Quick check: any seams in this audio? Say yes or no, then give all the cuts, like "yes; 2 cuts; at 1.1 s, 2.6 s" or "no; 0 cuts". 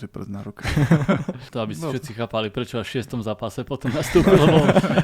yes; 1 cut; at 1.4 s